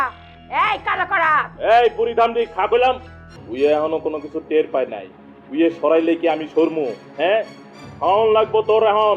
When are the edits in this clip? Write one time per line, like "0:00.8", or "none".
0:03.4